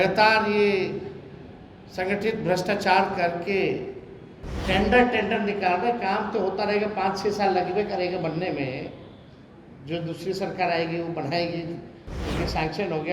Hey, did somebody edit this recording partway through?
no; 0 cuts

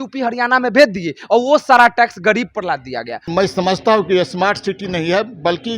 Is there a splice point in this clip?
yes; 1 cut; at 3.3 s

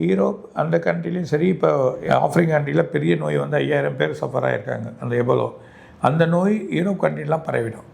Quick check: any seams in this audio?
no; 0 cuts

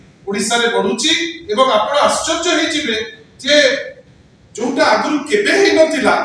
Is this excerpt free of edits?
yes; 0 cuts

